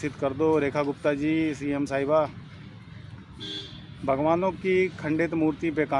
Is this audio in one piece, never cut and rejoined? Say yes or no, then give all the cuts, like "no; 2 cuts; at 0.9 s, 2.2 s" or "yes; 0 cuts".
yes; 0 cuts